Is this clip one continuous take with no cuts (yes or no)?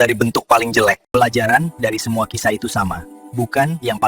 no